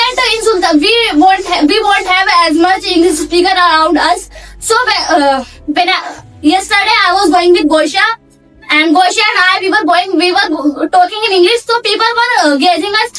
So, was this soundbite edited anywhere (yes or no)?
no